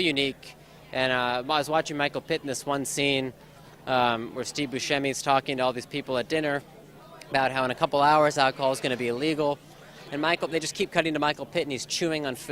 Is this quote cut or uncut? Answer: cut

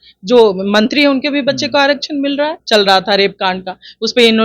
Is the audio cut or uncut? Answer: cut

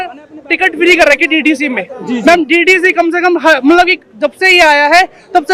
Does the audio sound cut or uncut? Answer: uncut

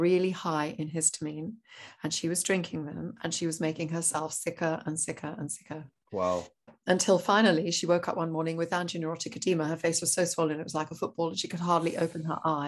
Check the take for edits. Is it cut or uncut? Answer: uncut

